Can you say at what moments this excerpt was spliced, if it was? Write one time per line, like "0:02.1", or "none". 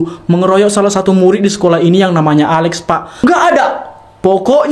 0:03.1